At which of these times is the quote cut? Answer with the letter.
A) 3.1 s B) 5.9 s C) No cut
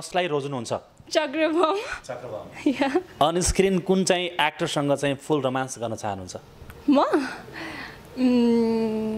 A